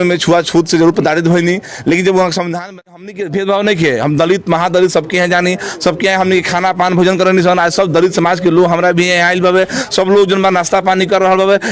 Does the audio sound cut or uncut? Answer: cut